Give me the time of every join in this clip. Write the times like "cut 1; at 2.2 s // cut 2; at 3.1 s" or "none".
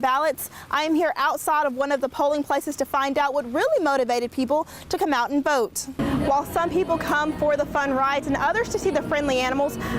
cut 1; at 5.8 s